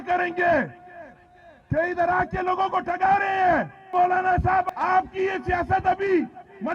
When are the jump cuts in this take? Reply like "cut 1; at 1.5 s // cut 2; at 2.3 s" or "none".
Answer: cut 1; at 3.9 s // cut 2; at 4.7 s